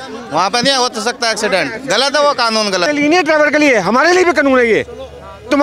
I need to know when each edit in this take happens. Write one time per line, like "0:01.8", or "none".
0:02.8